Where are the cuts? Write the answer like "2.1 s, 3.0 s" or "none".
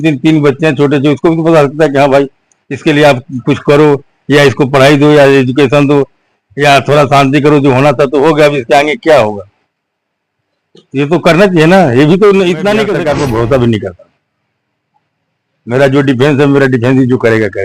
12.9 s